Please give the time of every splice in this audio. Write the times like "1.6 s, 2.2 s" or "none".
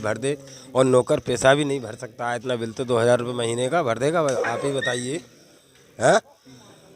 none